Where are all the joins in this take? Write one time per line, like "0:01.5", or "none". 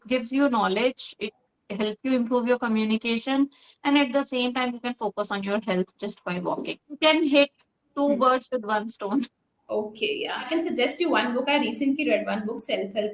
0:07.0
0:10.5